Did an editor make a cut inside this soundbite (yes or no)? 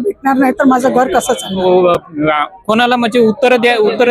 yes